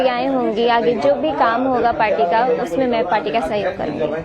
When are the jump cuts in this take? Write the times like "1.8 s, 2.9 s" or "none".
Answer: 1.0 s